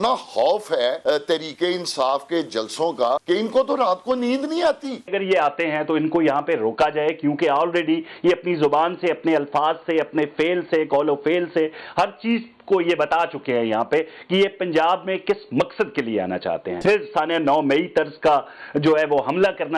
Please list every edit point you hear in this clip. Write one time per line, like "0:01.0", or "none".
0:01.0
0:03.2
0:05.1
0:16.7